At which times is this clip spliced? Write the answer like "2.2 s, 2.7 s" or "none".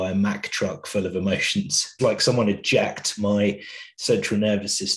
1.9 s